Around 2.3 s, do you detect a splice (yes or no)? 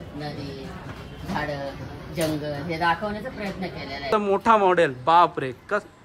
no